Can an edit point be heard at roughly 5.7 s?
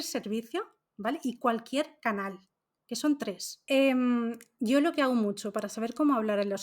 no; 1 cut; at 3.5 s

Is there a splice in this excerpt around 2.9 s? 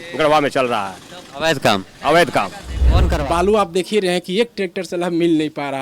yes; 1 cut; at 2.9 s

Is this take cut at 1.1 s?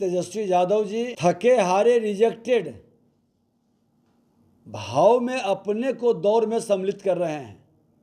yes; 1 cut; at 1.1 s

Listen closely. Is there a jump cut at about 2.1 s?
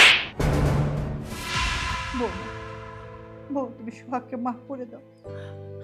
yes; 1 cut; at 2.1 s

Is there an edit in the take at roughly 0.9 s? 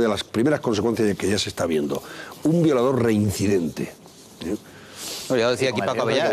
no; 1 cut; at 2.8 s

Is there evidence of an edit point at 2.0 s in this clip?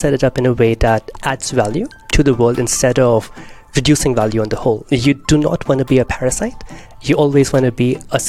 yes; 1 cut; at 2.0 s

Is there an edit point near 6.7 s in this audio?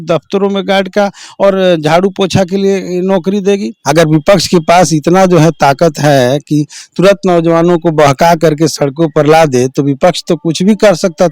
no; 1 cut; at 3.7 s

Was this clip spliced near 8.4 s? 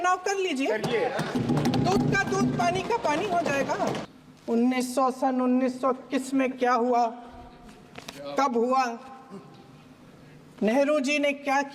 no; 2 cuts; at 1.4 s, 4.1 s

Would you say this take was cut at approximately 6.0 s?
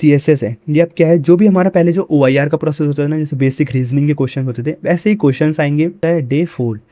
yes; 1 cut; at 6.0 s

